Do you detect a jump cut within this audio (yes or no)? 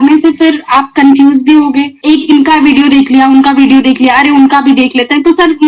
yes